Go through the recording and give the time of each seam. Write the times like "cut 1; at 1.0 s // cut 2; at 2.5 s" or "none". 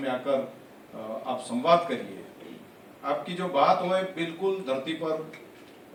none